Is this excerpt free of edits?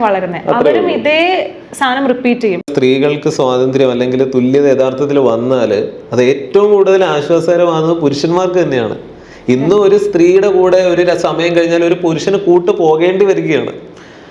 no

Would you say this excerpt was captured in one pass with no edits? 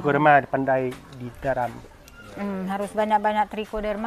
yes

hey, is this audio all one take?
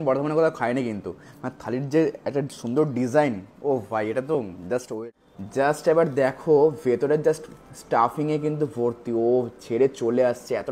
no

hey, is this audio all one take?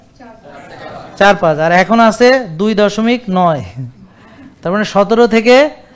yes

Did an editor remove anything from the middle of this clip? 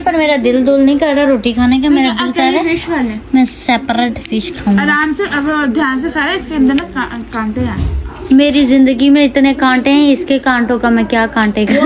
no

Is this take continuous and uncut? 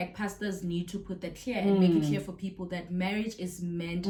yes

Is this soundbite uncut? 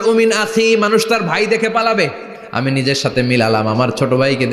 no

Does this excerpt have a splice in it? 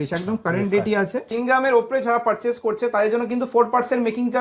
yes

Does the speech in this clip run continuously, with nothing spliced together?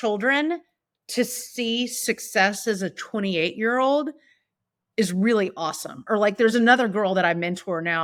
yes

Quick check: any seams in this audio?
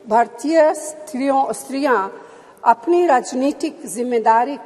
no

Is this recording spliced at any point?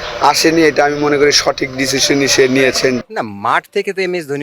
yes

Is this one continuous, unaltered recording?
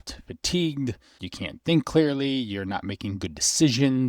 no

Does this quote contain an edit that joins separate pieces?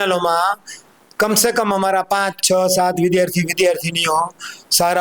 no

